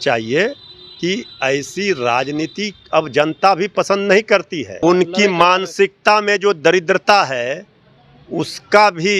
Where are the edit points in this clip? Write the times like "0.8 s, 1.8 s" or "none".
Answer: 4.8 s